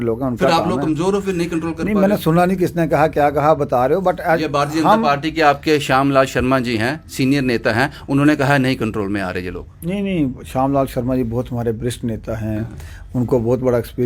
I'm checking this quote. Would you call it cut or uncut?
uncut